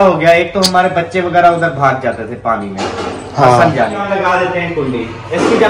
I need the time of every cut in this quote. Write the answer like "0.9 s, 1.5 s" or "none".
4.0 s